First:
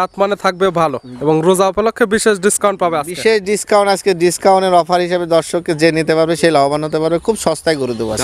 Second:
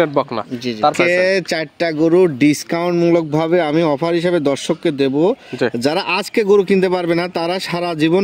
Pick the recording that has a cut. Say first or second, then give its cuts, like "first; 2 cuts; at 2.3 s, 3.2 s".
second; 1 cut; at 1.0 s